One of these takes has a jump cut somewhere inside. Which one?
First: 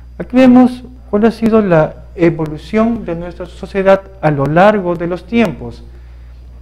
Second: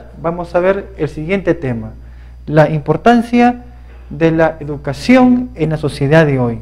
first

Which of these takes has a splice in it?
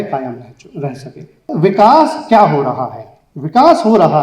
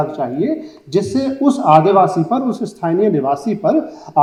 first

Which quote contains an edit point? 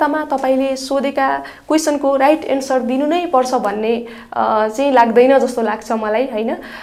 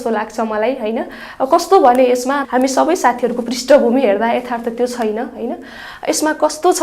second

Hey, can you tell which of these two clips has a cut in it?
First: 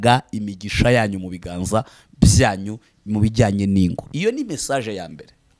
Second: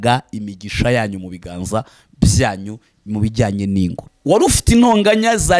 second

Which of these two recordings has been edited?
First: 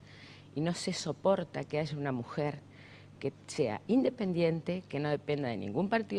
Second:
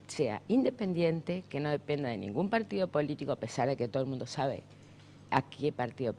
second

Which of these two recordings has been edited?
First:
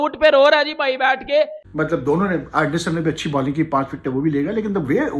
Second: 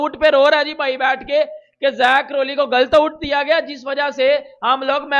first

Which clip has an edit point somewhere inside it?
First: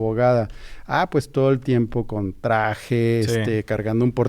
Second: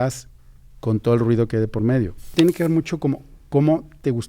second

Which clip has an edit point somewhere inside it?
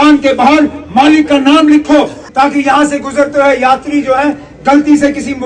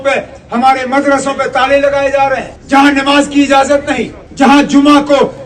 second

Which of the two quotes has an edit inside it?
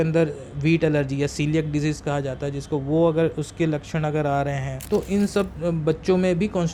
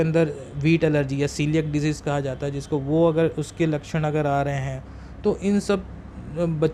first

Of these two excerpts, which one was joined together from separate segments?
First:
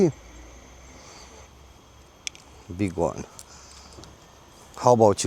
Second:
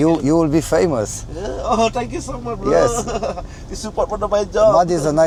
first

